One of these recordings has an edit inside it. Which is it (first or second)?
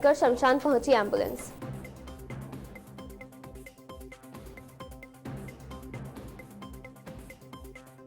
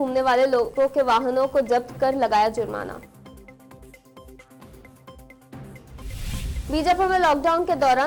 first